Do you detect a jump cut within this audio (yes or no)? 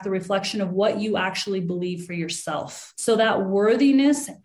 yes